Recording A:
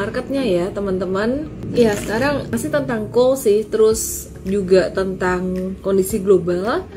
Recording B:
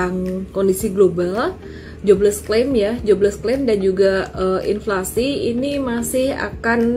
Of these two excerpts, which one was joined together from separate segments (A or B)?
A